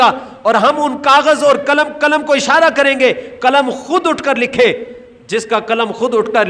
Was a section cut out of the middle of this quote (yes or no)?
no